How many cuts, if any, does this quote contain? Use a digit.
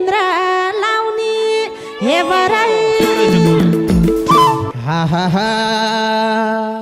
1